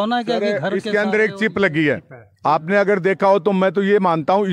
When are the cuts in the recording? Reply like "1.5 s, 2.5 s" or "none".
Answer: none